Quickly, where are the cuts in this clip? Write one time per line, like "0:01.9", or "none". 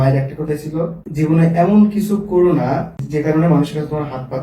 0:01.0
0:03.0